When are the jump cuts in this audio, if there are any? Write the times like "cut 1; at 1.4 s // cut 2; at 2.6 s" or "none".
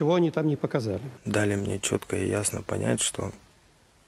cut 1; at 1.4 s